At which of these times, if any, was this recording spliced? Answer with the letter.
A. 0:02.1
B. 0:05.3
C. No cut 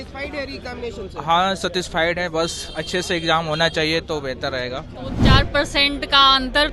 B